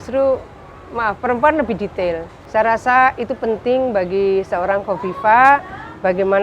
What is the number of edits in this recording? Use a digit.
1